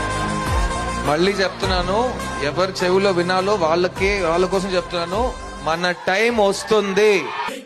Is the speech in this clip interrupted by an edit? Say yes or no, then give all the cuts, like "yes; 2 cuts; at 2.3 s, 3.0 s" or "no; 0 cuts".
no; 0 cuts